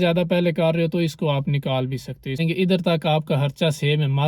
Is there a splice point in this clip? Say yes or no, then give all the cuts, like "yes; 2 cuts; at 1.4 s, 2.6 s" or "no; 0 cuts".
yes; 1 cut; at 2.4 s